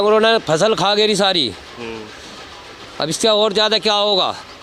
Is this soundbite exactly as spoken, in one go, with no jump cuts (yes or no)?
yes